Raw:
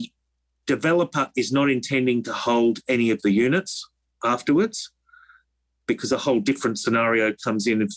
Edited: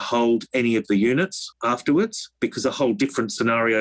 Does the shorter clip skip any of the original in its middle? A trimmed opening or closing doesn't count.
yes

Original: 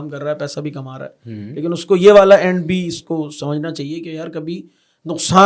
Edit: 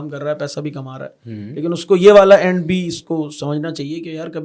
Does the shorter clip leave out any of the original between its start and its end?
no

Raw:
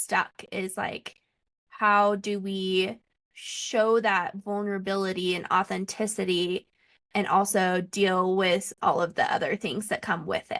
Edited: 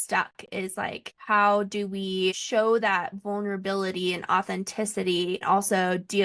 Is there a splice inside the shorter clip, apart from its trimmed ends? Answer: yes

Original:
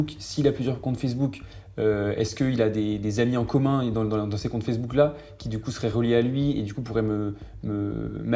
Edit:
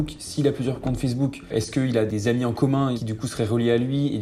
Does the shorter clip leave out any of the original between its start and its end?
yes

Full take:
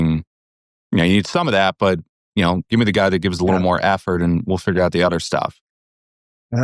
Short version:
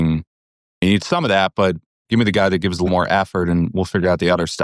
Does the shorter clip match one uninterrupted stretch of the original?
no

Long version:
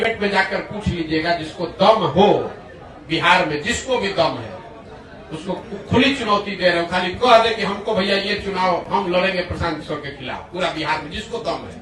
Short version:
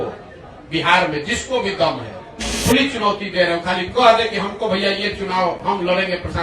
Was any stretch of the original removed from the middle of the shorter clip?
yes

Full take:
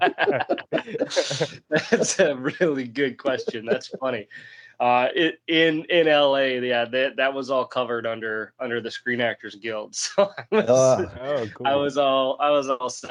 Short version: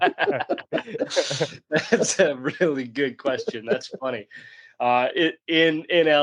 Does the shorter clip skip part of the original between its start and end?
no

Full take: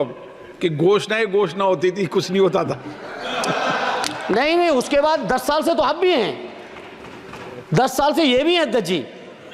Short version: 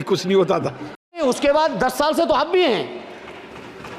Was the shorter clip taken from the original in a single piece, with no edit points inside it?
no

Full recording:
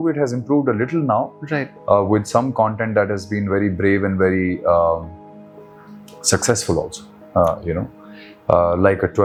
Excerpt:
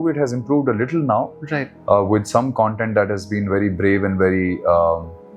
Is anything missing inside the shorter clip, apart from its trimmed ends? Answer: no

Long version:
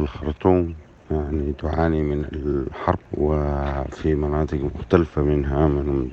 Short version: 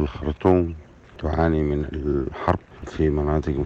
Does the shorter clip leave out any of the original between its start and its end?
yes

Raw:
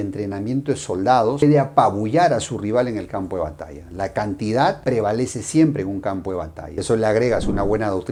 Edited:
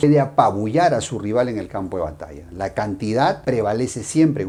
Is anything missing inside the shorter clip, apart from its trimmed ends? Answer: no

